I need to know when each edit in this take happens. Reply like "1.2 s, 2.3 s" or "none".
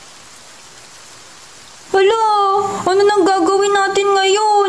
1.4 s

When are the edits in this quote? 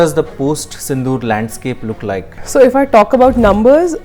2.3 s

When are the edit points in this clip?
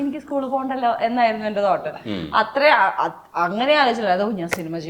none

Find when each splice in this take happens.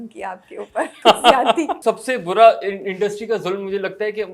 0.9 s, 1.7 s

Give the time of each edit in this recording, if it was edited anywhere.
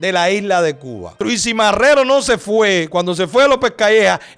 1.2 s

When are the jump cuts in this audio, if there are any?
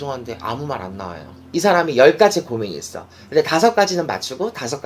1.4 s

